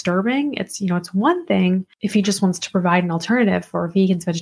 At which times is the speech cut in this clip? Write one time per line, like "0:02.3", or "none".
0:01.9